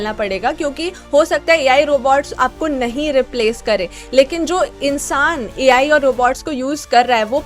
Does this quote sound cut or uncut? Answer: uncut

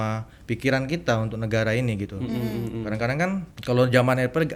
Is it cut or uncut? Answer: uncut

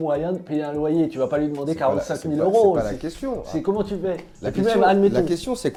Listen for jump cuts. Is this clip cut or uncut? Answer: uncut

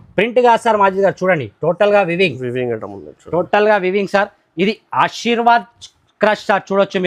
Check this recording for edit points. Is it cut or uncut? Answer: uncut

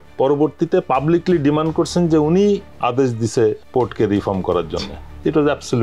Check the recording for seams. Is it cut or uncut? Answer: uncut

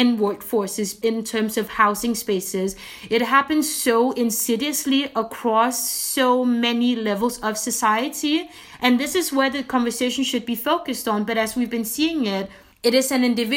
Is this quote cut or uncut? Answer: cut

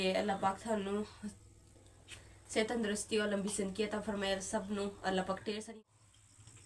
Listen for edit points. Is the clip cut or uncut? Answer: cut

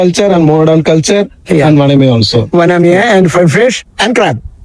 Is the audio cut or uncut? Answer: uncut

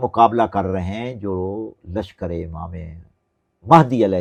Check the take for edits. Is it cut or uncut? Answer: uncut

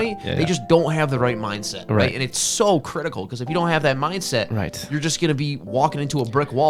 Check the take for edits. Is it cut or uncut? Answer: uncut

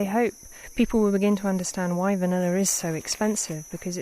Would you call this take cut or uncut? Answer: uncut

